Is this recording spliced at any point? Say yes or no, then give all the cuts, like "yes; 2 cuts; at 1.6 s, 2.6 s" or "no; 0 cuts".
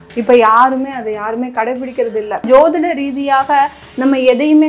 yes; 1 cut; at 2.4 s